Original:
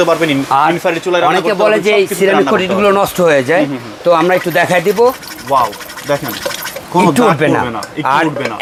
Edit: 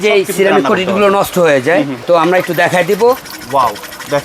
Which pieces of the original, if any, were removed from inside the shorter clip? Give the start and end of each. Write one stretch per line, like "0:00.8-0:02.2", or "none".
0:03.8-0:03.9